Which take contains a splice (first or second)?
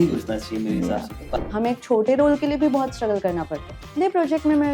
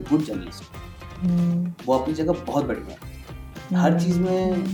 first